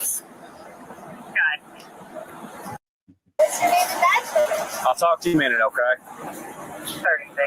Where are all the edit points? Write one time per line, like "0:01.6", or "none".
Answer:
0:03.4